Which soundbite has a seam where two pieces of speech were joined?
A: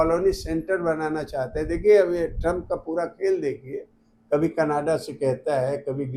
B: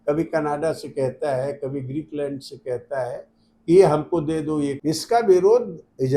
B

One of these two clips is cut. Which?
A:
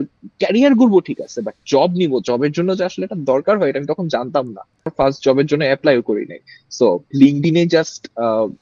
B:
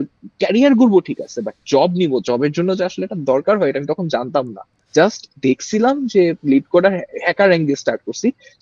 A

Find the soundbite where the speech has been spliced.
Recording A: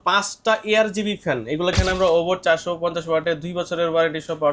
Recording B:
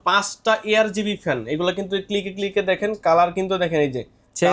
A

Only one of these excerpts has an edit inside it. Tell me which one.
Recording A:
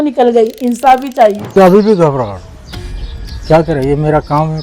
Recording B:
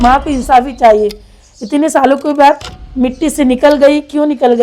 A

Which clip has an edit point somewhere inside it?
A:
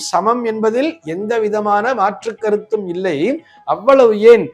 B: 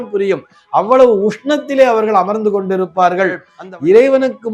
B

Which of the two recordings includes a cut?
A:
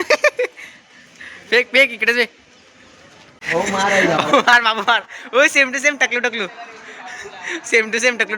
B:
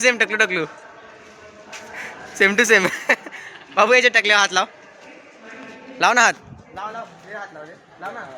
A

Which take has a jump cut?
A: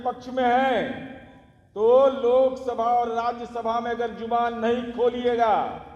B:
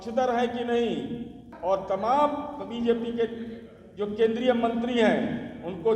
B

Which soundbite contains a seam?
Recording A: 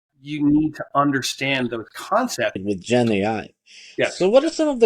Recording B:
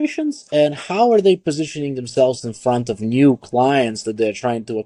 A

